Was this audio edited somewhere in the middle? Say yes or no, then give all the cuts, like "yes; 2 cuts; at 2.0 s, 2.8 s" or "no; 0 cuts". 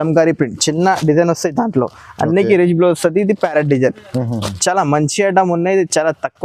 no; 0 cuts